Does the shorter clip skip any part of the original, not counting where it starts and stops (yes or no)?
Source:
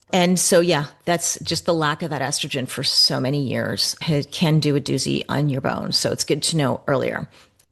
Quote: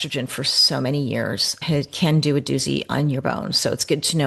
no